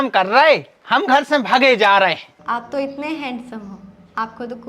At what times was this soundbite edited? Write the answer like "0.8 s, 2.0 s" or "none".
2.2 s